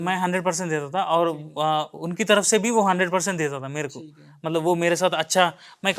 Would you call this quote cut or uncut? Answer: uncut